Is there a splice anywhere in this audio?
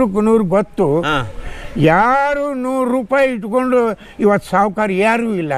no; 0 cuts

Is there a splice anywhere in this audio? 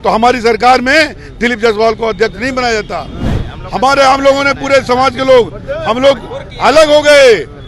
no; 0 cuts

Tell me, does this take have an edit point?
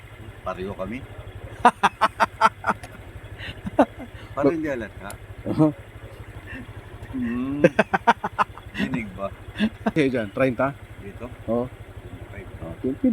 yes; 1 cut; at 9.9 s

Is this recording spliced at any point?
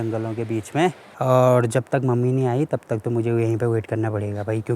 yes; 1 cut; at 1.1 s

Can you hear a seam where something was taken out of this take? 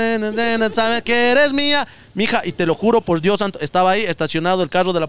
no; 0 cuts

